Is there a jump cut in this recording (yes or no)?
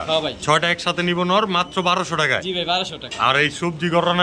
no